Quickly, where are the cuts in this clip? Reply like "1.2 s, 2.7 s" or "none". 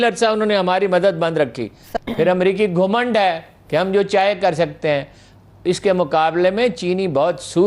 1.8 s